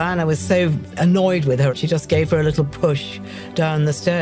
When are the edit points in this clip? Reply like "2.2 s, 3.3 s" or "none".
1.7 s